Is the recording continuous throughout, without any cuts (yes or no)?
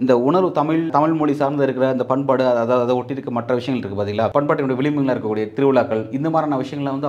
no